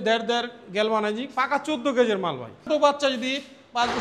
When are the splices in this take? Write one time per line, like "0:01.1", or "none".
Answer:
0:02.7